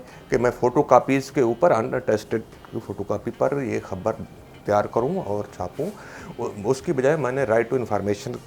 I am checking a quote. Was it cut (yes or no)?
no